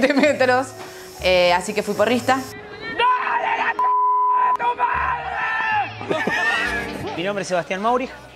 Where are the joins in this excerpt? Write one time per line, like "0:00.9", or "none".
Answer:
0:06.7